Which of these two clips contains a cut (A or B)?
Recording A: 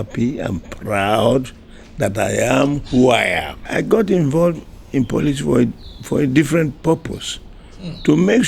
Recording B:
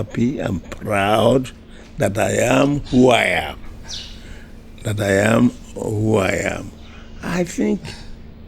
A